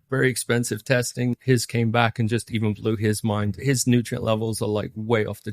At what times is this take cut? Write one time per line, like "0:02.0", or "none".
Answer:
0:01.3
0:03.6